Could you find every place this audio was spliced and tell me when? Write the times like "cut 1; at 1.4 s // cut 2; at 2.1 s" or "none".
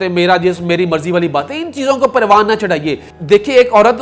cut 1; at 3.1 s

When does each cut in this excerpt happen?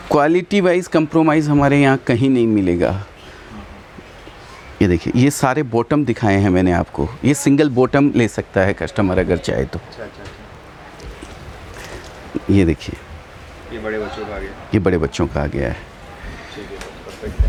none

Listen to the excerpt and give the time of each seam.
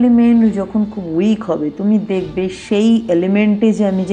none

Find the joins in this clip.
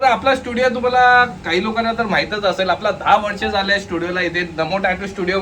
none

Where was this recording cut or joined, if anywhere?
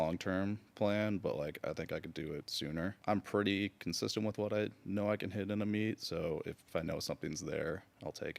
cut 1; at 2.9 s // cut 2; at 6.6 s

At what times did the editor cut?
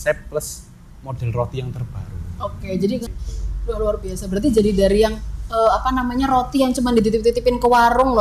cut 1; at 3.1 s

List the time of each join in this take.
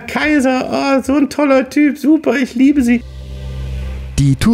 cut 1; at 3.2 s

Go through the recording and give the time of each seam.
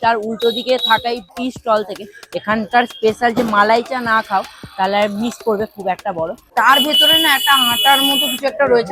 cut 1; at 1.3 s // cut 2; at 6.5 s

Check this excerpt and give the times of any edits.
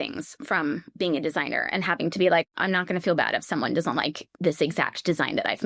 cut 1; at 2.6 s

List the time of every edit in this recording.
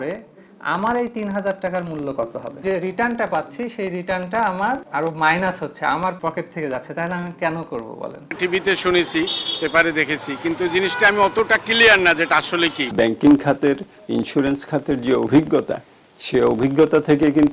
cut 1; at 2.6 s // cut 2; at 4.9 s // cut 3; at 6.2 s // cut 4; at 8.4 s // cut 5; at 12.9 s

